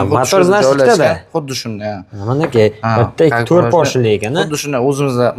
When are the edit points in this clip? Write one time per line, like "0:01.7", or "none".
none

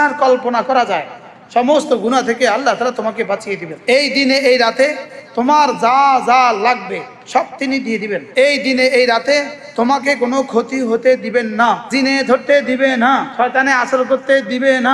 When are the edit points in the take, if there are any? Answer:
0:03.7
0:08.2
0:11.9
0:13.3

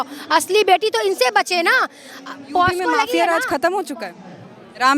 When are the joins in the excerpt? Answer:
0:03.1

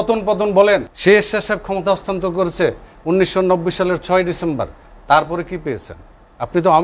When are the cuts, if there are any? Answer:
0:00.9

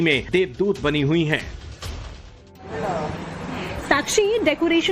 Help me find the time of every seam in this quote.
0:03.4

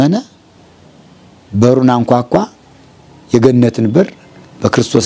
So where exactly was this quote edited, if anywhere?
none

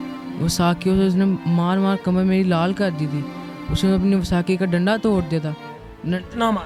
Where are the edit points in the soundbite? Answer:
none

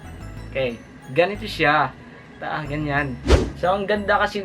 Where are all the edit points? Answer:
0:03.3

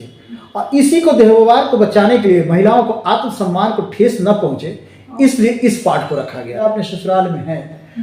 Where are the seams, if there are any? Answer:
0:06.6

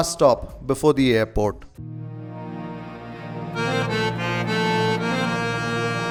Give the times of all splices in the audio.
none

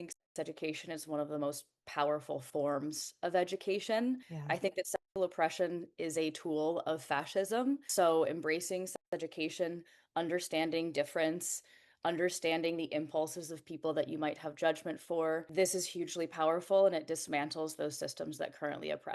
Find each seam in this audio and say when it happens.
0:04.3
0:07.9
0:15.5

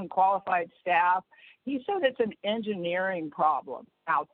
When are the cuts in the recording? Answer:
none

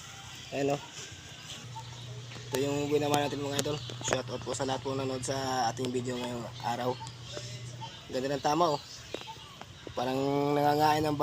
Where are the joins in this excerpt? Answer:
0:01.8

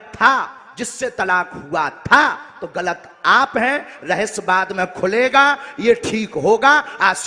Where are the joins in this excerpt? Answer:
none

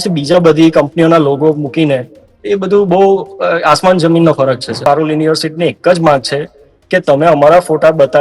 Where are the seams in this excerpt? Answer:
0:04.8

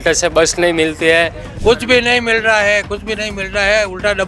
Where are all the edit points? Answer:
0:01.4

